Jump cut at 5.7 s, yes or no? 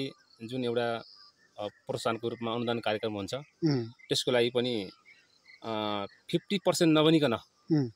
no